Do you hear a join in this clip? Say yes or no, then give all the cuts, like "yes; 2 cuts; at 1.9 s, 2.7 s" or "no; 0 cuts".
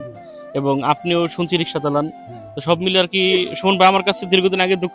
no; 0 cuts